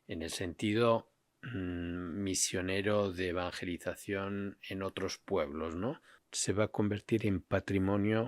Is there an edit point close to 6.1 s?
yes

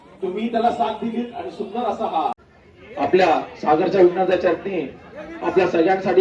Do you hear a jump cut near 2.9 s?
yes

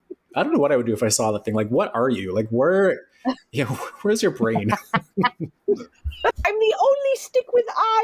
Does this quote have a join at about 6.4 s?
yes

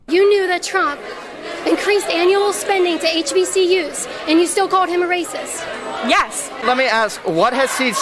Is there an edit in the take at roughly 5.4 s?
no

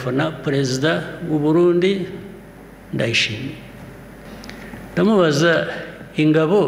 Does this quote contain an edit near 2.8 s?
no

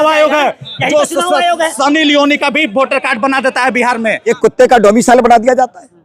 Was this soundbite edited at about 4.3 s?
yes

